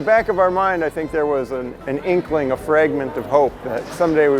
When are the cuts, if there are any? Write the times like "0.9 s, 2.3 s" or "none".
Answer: 1.7 s